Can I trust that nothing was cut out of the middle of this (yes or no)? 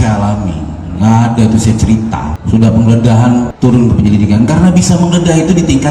no